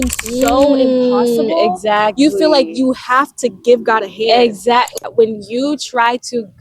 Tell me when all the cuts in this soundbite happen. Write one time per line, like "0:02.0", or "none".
0:04.9